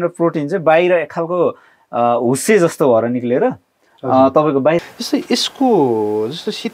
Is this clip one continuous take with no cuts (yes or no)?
no